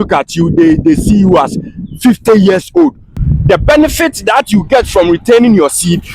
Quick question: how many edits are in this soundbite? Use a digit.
1